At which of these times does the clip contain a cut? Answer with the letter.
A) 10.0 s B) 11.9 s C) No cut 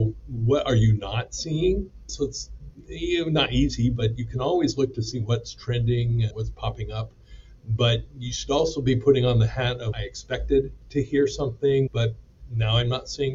B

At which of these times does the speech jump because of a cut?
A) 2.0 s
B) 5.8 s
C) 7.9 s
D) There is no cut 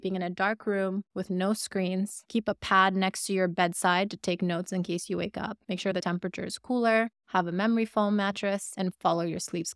D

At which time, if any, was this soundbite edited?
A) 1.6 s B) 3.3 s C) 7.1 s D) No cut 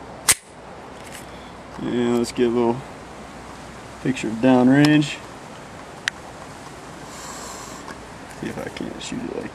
A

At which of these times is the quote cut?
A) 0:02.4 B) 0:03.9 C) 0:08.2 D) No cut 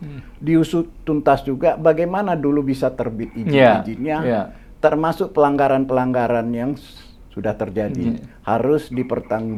D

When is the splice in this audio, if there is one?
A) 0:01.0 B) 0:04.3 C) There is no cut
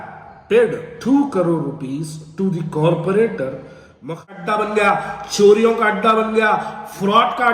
B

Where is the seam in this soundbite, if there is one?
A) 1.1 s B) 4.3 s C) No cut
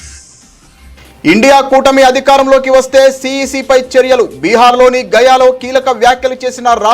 A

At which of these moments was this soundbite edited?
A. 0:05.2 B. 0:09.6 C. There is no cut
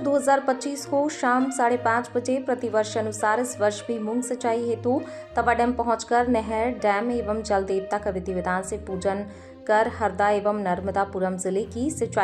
C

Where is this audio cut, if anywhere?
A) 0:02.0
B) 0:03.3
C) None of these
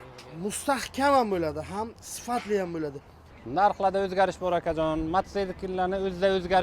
B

